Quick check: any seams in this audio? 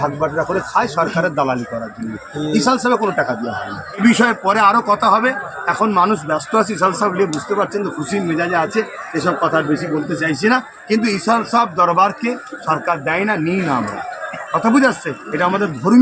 yes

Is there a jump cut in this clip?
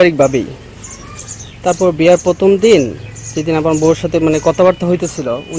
no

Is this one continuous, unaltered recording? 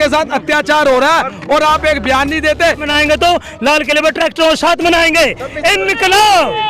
no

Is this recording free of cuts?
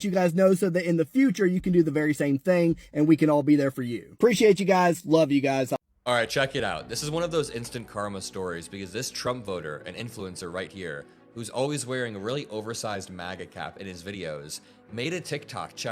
no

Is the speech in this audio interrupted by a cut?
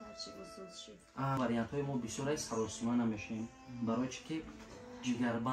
yes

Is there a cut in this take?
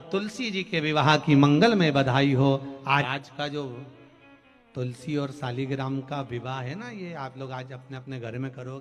yes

